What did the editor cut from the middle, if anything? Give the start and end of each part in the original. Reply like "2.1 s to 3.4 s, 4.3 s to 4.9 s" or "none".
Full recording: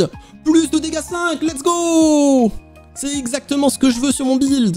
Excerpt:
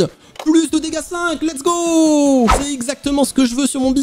2.7 s to 3.1 s